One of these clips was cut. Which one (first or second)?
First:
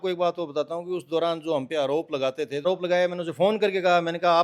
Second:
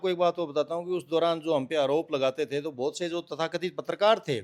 first